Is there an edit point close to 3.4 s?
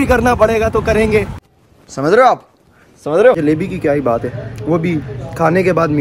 yes; 1 cut; at 3.4 s

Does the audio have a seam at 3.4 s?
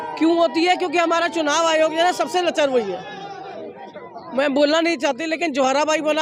no; 0 cuts

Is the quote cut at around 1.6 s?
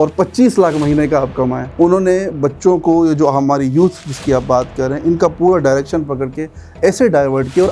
yes; 1 cut; at 1.6 s

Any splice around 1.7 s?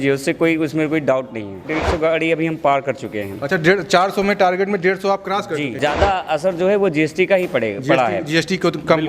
yes; 2 cuts; at 1.7 s, 5.8 s

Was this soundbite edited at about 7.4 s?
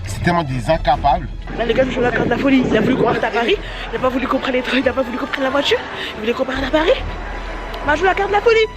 no; 1 cut; at 1.4 s

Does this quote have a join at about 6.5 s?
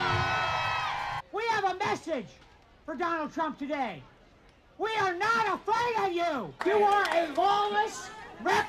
yes; 2 cuts; at 1.2 s, 6.5 s

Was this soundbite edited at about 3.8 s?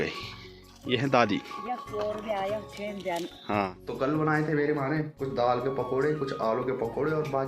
yes; 2 cuts; at 3.8 s, 5.1 s

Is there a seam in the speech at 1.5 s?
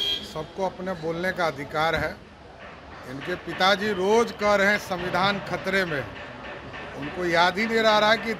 no; 0 cuts

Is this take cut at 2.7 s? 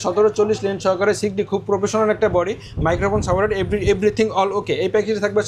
no; 0 cuts

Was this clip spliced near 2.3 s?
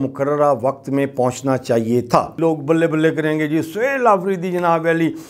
yes; 1 cut; at 2.3 s

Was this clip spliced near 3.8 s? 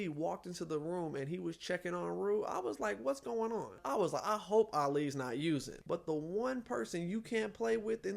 yes; 2 cuts; at 3.8 s, 5.7 s

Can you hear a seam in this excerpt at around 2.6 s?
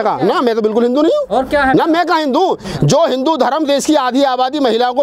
yes; 1 cut; at 2.6 s

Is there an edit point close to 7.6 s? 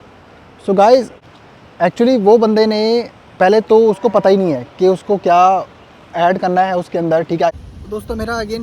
yes; 1 cut; at 7.6 s

